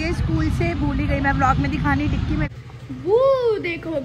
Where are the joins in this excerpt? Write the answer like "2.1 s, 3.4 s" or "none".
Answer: 2.5 s